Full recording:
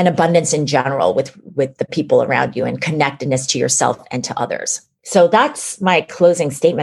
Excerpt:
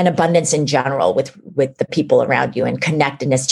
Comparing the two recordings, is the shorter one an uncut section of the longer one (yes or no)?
yes